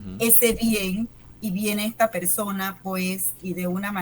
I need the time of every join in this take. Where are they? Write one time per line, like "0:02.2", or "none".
0:01.2